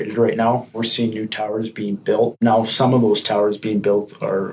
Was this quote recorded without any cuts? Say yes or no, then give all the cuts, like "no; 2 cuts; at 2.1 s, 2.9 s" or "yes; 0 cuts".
no; 2 cuts; at 0.8 s, 2.4 s